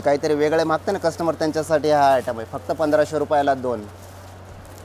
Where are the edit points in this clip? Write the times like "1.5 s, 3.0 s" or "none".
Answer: none